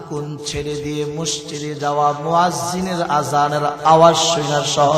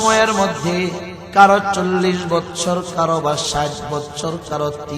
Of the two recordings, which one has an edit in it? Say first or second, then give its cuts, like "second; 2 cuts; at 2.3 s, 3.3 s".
second; 1 cut; at 1.2 s